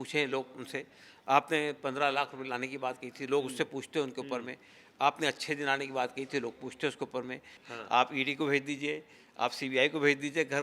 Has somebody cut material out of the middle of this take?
yes; 1 cut; at 7.6 s

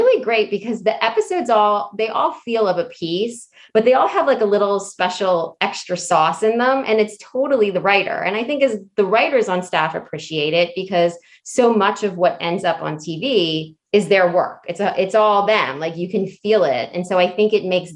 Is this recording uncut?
yes; 0 cuts

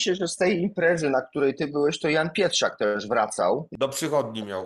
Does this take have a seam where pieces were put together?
yes; 1 cut; at 3.7 s

